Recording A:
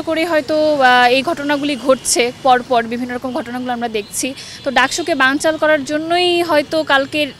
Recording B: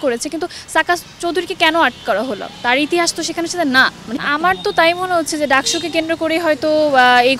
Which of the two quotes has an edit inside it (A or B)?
B